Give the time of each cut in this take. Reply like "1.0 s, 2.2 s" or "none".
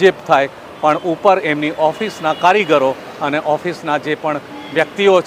none